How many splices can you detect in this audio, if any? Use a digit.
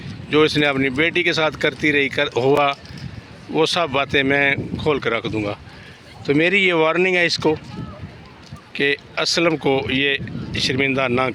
0